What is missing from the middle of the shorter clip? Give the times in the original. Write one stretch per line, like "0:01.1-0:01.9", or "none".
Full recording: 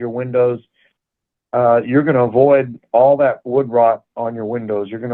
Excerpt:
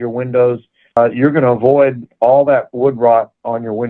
0:01.0-0:01.7